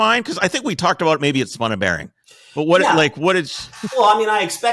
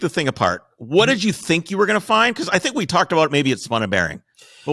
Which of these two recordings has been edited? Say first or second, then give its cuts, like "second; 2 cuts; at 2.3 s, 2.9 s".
first; 1 cut; at 3.5 s